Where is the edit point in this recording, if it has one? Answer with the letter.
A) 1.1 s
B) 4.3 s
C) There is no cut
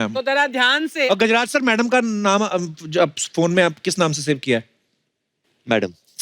A